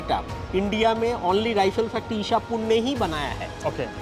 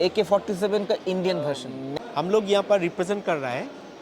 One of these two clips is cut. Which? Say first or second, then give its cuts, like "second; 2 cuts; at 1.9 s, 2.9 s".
second; 1 cut; at 1.8 s